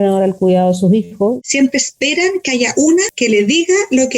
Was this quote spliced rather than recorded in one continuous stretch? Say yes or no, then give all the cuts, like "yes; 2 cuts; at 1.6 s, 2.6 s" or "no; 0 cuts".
yes; 1 cut; at 1.4 s